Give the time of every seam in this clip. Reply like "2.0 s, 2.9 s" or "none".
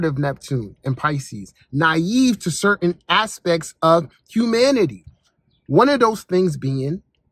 none